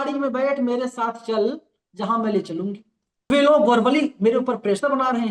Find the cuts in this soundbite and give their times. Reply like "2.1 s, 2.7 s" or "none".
3.3 s